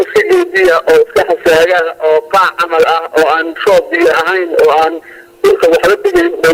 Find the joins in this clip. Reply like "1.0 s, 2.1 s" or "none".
none